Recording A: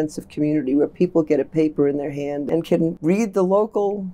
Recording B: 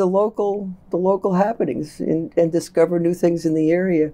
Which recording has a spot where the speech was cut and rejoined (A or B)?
A